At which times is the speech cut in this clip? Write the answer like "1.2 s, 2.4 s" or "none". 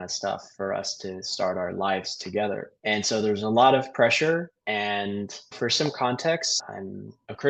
none